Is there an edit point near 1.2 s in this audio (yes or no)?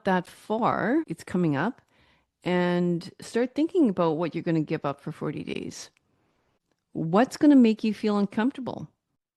yes